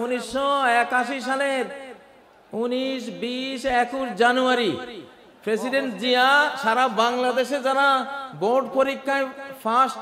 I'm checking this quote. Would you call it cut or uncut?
uncut